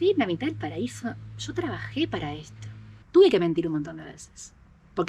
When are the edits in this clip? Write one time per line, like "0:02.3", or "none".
0:03.0

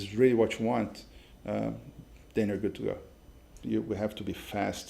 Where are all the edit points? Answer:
0:03.6

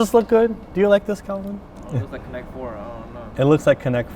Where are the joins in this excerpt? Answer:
0:01.8

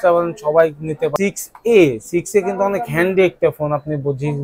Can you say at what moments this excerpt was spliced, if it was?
0:01.1

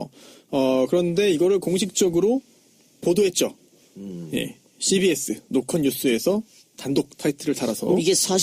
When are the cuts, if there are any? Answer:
none

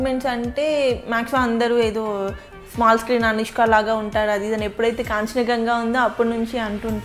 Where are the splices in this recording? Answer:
none

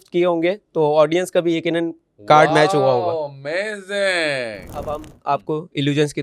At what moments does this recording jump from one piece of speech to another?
0:04.7

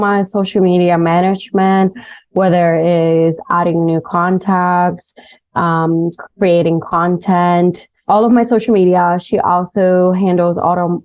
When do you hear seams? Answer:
none

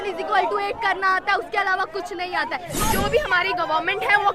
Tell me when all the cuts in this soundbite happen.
0:02.7

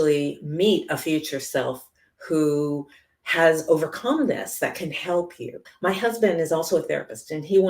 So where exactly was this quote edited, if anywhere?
0:05.7

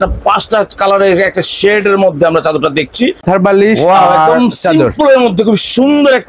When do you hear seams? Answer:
0:03.2

